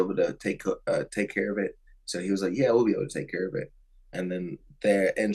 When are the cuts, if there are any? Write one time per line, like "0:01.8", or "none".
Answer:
none